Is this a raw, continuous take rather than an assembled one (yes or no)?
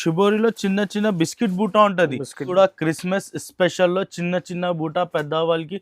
no